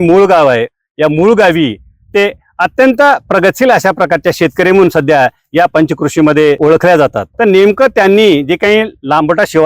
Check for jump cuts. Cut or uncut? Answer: cut